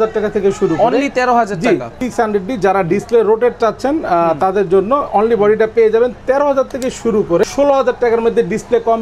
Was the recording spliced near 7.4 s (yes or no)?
yes